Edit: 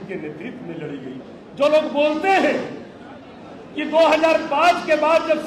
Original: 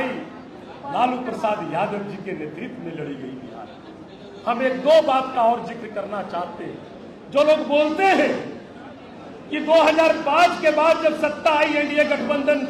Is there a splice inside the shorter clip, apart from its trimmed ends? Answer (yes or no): yes